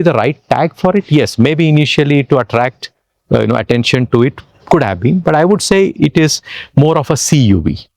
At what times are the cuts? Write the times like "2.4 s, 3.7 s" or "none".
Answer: none